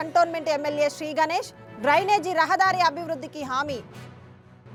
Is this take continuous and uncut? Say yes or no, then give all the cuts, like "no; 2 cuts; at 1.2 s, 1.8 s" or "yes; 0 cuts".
yes; 0 cuts